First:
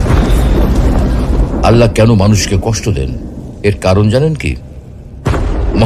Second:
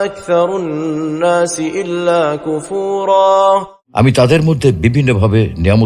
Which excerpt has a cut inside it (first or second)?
second